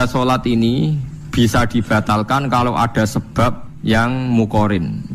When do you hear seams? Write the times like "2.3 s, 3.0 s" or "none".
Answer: 3.7 s